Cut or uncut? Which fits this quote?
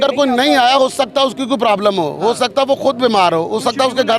uncut